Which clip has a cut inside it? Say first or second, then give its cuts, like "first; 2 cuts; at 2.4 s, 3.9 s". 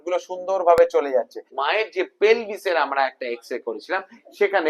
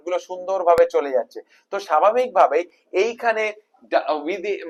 first; 1 cut; at 1.5 s